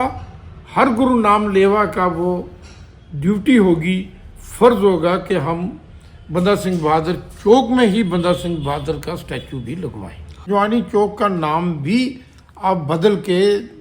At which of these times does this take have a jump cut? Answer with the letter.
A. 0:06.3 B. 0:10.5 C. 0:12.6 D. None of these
B